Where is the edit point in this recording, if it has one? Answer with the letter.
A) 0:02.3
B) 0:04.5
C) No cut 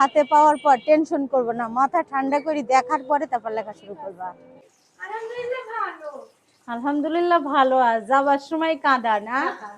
B